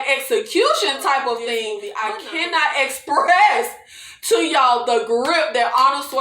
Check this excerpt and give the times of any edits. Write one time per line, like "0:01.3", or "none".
0:01.8